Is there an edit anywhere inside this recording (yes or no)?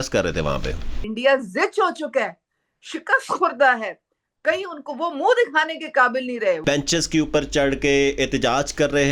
yes